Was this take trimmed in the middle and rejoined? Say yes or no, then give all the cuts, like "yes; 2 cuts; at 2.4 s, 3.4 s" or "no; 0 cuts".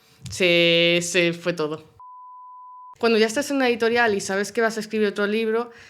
yes; 1 cut; at 2.4 s